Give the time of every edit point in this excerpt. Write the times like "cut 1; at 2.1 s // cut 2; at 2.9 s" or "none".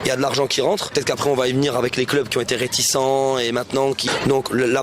cut 1; at 0.9 s // cut 2; at 4.0 s